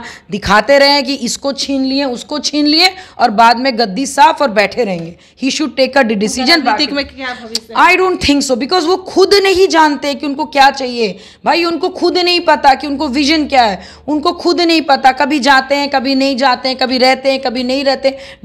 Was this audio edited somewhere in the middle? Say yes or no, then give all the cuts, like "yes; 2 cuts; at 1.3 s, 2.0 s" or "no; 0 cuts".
no; 0 cuts